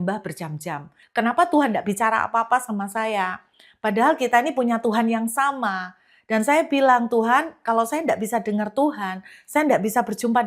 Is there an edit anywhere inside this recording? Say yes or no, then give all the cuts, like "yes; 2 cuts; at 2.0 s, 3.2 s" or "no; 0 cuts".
yes; 1 cut; at 0.9 s